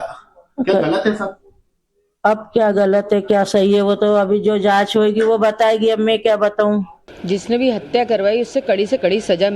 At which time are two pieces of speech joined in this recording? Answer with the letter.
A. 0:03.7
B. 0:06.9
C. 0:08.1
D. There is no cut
C